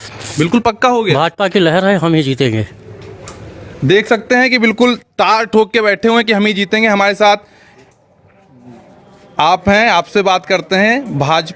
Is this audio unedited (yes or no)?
yes